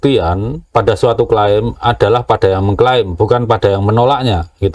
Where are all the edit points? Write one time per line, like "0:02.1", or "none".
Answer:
none